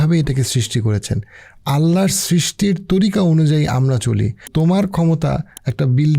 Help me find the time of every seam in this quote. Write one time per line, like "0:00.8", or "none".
0:04.4